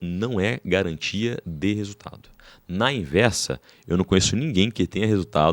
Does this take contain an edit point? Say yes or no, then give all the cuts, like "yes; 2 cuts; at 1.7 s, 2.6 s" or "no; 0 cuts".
no; 0 cuts